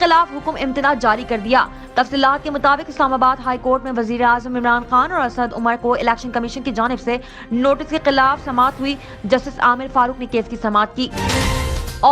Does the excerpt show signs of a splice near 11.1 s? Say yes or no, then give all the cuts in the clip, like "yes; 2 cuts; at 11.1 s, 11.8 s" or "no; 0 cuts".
yes; 1 cut; at 11.1 s